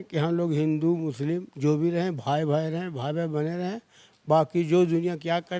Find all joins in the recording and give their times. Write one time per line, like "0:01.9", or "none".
none